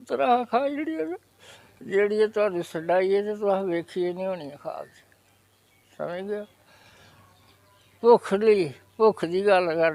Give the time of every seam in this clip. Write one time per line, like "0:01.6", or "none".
none